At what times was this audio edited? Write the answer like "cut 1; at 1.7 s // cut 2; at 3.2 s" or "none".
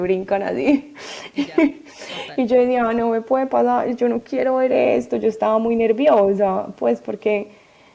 none